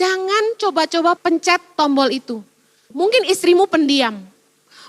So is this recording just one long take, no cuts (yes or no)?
no